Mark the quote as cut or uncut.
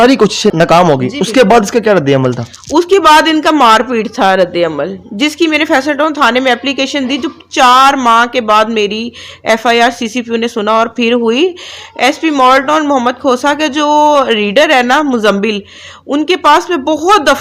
uncut